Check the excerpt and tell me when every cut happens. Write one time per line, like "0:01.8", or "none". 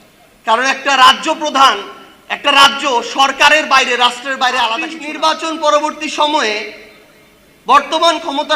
0:05.0